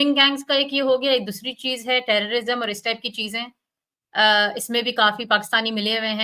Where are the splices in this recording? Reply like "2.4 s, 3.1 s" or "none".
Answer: none